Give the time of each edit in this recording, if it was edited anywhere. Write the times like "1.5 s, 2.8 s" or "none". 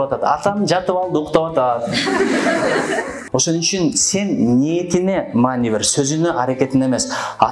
3.2 s